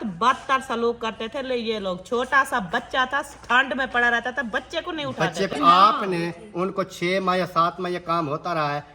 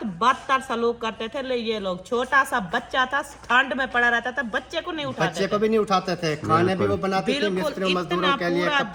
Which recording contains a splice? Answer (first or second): first